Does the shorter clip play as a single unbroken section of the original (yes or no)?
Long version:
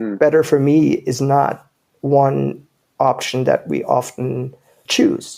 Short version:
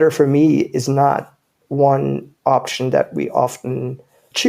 no